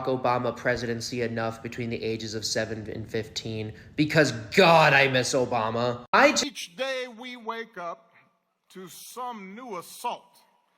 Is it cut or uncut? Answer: cut